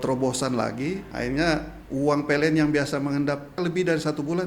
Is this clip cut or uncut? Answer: cut